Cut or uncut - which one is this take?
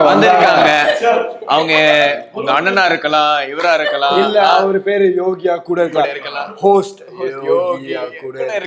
uncut